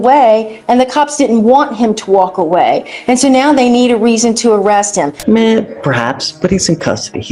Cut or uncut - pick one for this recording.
cut